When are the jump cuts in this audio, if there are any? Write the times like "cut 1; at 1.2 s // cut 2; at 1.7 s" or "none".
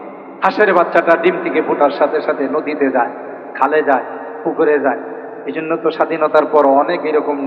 none